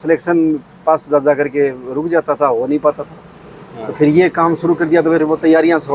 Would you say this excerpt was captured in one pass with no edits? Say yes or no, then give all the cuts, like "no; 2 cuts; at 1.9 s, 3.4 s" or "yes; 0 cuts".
yes; 0 cuts